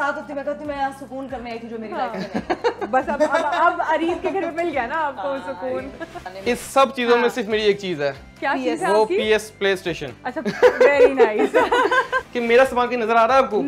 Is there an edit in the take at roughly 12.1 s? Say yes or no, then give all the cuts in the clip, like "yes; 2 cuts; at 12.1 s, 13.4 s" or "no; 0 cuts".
yes; 2 cuts; at 6.2 s, 12.1 s